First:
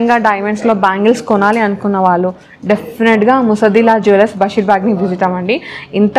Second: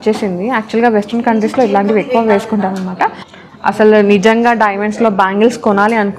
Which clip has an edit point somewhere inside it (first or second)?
second